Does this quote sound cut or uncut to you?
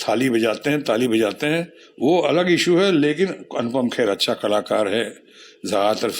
uncut